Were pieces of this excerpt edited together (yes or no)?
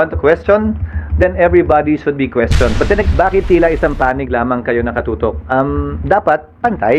yes